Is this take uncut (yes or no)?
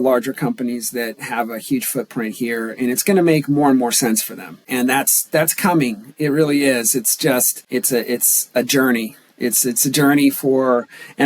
no